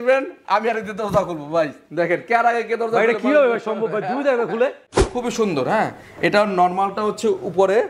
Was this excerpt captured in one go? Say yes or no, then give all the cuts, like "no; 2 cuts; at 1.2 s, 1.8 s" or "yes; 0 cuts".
no; 1 cut; at 5.0 s